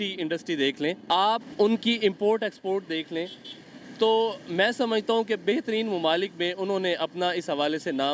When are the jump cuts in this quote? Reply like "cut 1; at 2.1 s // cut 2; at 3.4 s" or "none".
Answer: cut 1; at 1.0 s